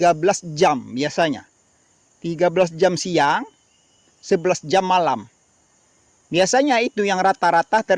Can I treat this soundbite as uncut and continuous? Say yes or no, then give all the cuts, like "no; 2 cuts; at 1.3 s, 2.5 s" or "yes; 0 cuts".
yes; 0 cuts